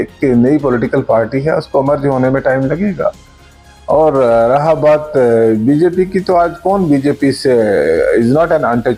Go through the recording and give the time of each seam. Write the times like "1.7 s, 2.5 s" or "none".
none